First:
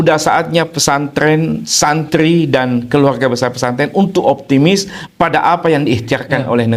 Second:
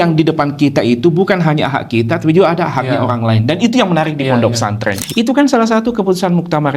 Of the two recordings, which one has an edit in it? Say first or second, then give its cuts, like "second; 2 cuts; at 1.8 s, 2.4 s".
second; 1 cut; at 5.0 s